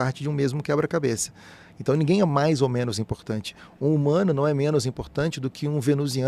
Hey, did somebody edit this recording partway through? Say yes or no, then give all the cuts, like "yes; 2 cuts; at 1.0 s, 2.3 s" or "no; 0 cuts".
no; 0 cuts